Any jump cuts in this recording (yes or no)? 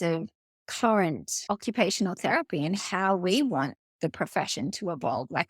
yes